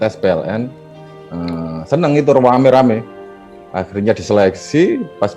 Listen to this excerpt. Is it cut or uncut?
uncut